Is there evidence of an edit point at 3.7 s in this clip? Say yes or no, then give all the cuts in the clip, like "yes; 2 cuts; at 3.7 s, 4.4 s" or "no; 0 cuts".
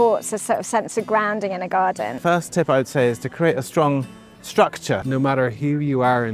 no; 2 cuts; at 2.2 s, 5.0 s